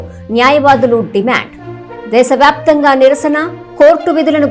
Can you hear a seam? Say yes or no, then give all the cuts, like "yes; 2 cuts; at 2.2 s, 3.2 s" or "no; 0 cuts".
no; 0 cuts